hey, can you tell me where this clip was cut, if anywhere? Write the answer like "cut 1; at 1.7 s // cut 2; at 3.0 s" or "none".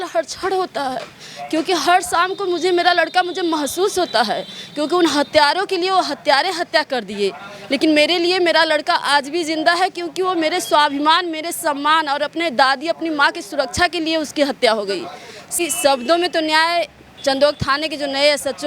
cut 1; at 15.6 s